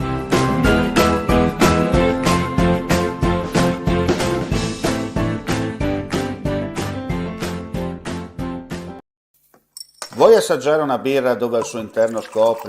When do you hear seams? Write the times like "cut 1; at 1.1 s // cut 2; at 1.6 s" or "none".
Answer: cut 1; at 9.0 s